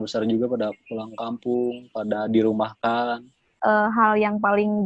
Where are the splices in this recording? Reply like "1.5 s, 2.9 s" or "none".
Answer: 3.6 s

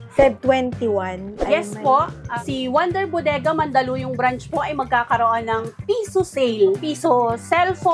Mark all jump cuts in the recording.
2.2 s, 6.9 s

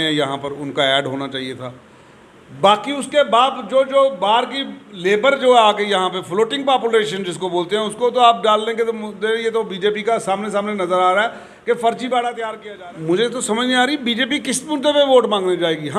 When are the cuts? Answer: 12.5 s

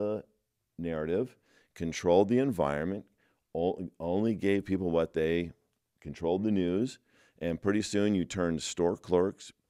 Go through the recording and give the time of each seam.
none

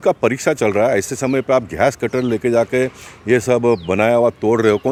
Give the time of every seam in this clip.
none

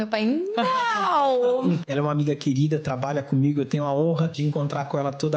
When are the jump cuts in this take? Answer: 1.8 s, 4.3 s

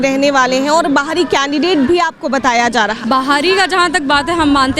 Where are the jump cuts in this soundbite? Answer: 3.0 s

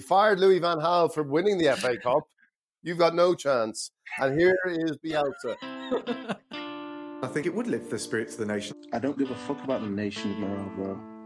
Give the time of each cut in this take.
6.5 s

